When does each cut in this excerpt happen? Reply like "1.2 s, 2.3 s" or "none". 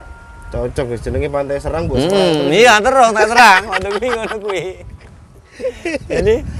none

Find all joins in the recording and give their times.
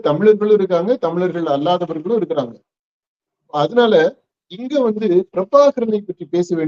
none

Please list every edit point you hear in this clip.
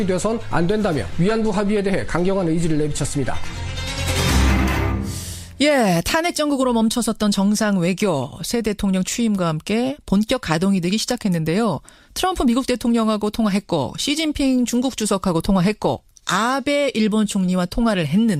none

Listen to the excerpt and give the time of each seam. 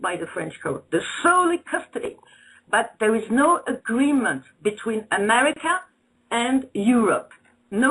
1.7 s

